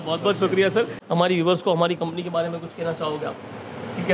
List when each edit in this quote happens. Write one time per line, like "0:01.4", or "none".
0:01.0